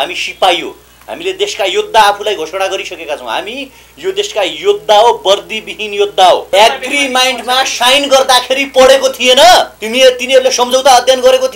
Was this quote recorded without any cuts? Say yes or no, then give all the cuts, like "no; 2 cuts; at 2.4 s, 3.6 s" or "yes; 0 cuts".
no; 2 cuts; at 6.4 s, 9.8 s